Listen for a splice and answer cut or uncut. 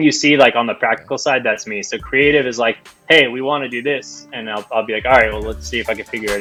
uncut